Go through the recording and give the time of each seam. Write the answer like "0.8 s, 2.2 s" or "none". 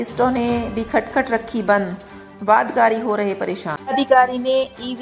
3.7 s